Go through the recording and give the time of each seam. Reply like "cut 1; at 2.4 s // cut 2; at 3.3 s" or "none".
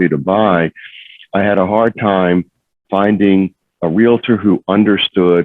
none